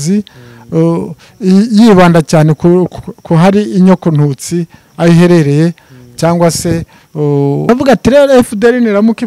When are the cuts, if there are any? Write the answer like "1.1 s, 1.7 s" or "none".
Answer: 7.7 s